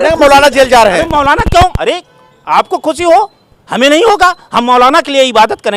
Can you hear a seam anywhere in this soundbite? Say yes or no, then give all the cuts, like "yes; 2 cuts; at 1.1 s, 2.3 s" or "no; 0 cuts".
no; 0 cuts